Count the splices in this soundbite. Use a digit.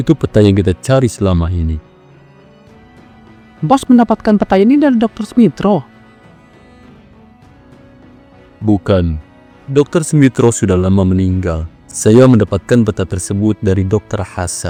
0